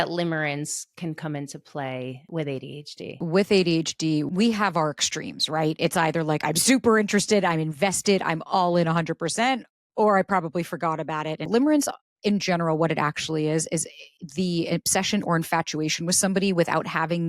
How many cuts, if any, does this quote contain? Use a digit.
4